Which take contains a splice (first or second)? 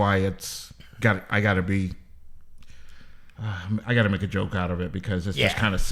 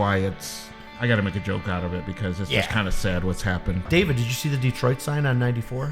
second